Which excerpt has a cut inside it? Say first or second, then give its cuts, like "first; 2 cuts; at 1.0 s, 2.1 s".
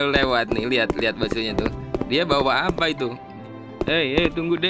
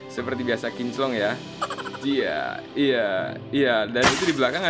first; 1 cut; at 3.2 s